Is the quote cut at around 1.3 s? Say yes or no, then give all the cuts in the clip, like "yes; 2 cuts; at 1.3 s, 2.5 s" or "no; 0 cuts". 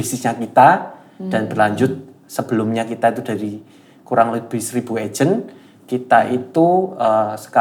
no; 0 cuts